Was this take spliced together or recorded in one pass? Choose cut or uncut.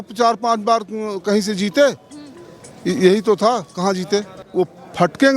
cut